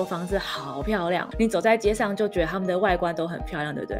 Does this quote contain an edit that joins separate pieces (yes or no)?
yes